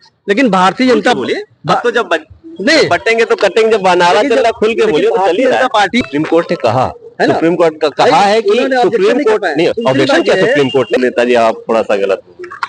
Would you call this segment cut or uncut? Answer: cut